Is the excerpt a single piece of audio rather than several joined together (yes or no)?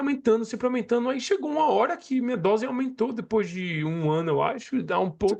yes